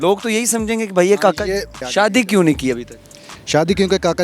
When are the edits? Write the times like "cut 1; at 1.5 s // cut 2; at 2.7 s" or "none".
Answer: cut 1; at 1.8 s